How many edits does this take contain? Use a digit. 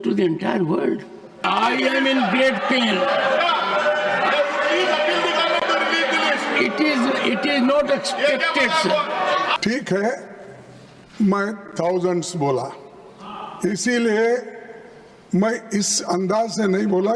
2